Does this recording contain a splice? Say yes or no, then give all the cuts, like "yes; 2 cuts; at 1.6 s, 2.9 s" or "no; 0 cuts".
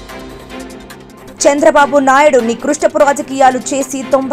no; 0 cuts